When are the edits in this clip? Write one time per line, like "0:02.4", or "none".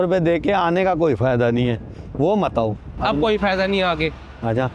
none